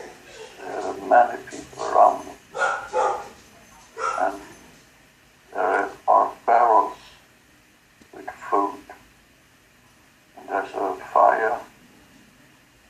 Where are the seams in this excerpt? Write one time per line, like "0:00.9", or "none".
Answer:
0:05.5